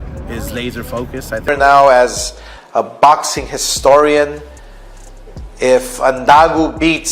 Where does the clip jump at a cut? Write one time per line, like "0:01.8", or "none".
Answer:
0:01.4